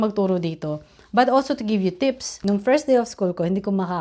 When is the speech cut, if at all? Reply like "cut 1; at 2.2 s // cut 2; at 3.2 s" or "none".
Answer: cut 1; at 2.3 s